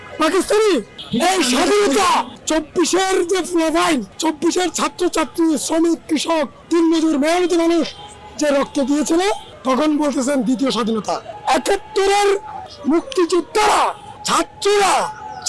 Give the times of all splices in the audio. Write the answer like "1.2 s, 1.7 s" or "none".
0.9 s, 2.4 s, 4.1 s